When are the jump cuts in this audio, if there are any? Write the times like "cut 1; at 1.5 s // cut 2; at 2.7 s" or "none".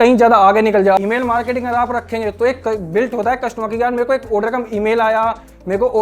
cut 1; at 1.0 s

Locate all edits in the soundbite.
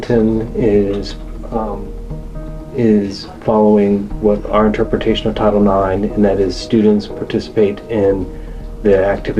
none

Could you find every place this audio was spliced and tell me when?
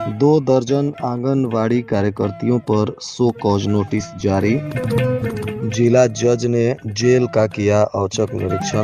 none

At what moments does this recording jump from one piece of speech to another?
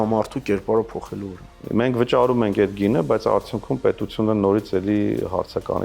cut 1; at 1.6 s

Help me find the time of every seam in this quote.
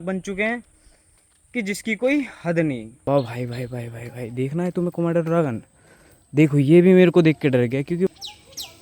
cut 1; at 2.9 s // cut 2; at 8.1 s

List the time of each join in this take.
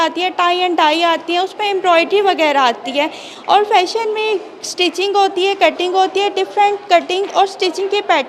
none

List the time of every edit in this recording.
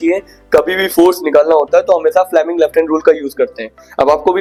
none

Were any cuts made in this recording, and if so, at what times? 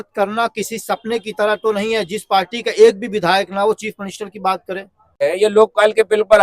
cut 1; at 5.2 s

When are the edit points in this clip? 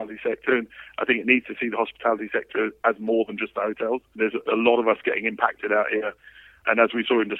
cut 1; at 4.1 s // cut 2; at 6.6 s

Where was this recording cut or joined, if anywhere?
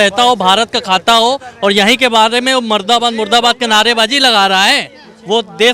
none

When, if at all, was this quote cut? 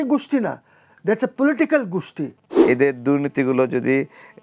cut 1; at 2.4 s

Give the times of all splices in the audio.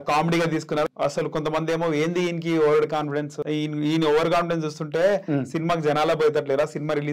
cut 1; at 0.9 s // cut 2; at 3.4 s

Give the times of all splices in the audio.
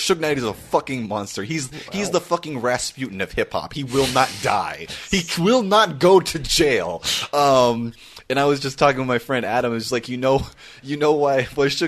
none

